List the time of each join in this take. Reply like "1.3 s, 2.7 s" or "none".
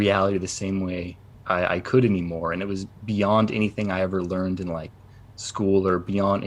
none